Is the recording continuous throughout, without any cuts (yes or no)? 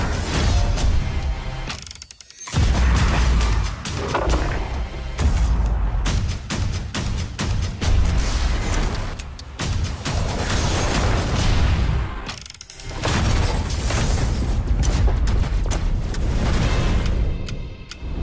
yes